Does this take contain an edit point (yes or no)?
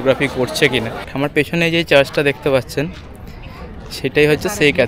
yes